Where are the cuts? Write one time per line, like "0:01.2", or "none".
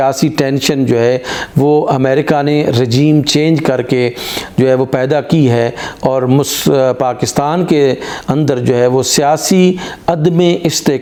none